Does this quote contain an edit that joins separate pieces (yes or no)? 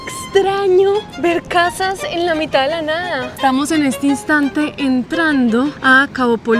yes